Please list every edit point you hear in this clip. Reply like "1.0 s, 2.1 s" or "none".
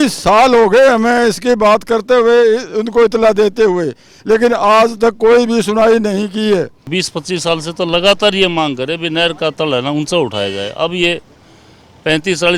6.9 s